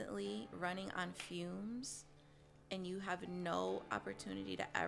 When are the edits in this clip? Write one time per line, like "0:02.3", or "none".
none